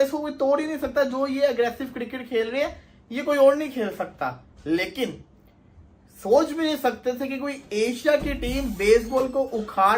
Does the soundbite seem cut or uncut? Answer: uncut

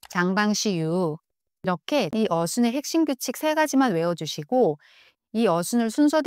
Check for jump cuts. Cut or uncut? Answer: cut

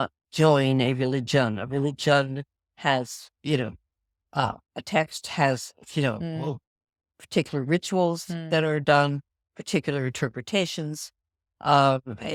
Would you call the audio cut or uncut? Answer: uncut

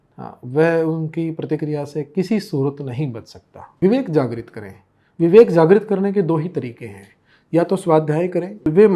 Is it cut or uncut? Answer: cut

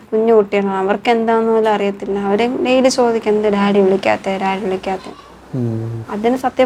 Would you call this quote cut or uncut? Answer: uncut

